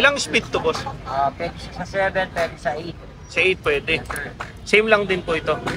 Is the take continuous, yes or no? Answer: yes